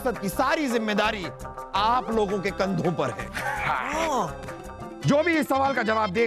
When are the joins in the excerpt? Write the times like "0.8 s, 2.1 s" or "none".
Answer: 1.7 s, 4.9 s